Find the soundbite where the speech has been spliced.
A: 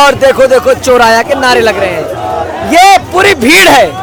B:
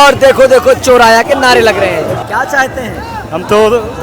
B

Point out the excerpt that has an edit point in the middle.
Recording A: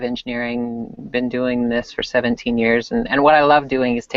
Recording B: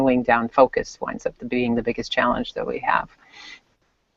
A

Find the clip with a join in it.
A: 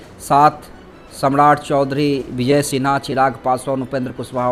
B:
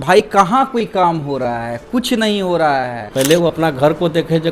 B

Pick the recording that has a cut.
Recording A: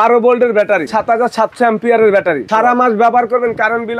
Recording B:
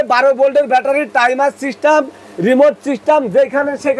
A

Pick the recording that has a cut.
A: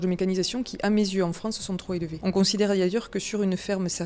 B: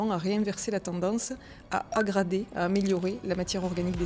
A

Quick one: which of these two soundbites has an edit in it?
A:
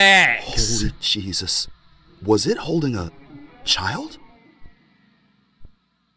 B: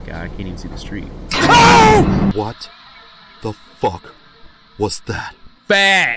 B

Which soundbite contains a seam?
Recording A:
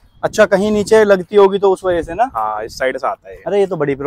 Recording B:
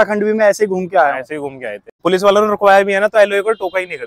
B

